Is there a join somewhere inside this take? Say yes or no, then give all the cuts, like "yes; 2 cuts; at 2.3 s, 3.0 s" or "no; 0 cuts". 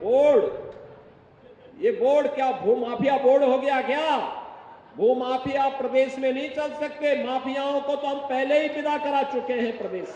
no; 0 cuts